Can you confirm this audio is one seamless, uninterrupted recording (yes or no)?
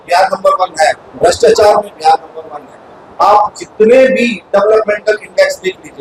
yes